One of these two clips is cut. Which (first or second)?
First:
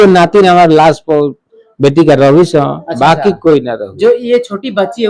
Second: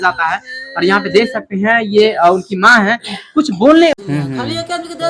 second